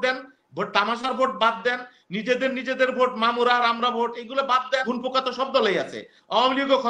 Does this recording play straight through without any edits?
no; 1 cut; at 4.9 s

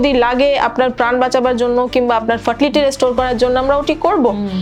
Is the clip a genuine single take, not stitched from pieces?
yes; 0 cuts

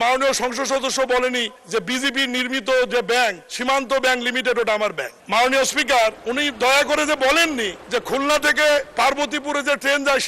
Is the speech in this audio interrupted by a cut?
yes; 6 cuts; at 1.6 s, 3.5 s, 5.1 s, 6.2 s, 7.8 s, 8.9 s

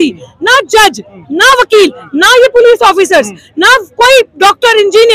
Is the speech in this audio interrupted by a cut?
no; 0 cuts

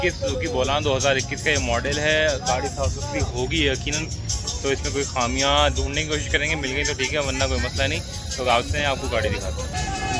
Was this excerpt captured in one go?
yes; 0 cuts

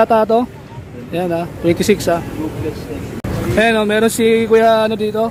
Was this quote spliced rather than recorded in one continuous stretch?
no; 0 cuts

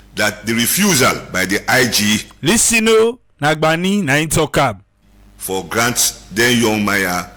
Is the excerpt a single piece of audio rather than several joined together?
yes; 0 cuts

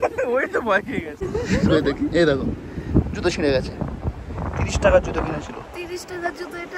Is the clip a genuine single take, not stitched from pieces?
no; 1 cut; at 1.2 s

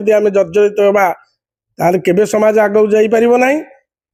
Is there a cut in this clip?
no; 0 cuts

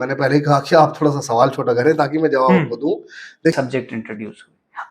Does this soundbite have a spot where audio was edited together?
yes; 1 cut; at 3.5 s

